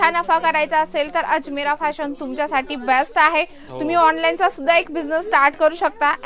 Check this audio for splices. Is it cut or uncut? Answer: uncut